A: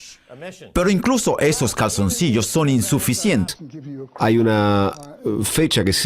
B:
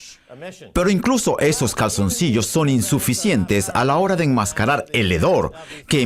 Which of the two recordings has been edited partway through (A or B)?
B